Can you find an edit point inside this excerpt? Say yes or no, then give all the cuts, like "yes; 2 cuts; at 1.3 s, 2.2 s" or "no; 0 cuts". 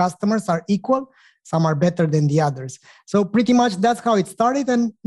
no; 0 cuts